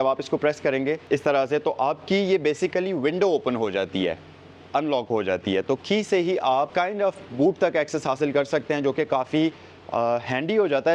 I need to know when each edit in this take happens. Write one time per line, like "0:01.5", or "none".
0:01.0
0:06.7